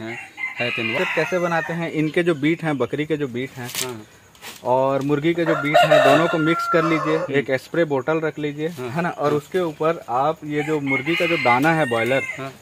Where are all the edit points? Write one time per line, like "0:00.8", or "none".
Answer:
0:00.9